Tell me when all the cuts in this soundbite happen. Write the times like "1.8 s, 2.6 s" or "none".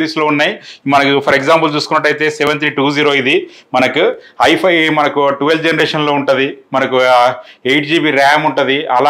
none